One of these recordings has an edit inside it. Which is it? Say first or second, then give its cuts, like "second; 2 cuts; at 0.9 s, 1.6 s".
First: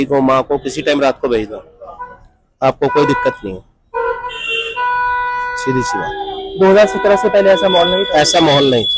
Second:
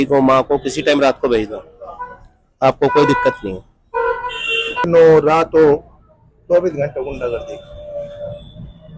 second; 1 cut; at 4.9 s